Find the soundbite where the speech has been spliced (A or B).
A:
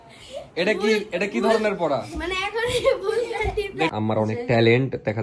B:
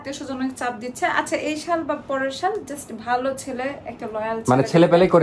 A